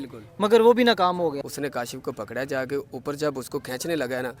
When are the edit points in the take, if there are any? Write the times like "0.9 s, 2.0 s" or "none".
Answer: 1.4 s